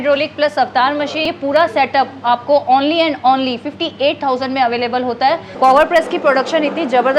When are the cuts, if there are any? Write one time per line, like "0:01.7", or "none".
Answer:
0:01.2
0:05.5